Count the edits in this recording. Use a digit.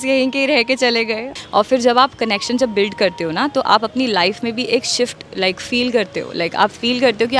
1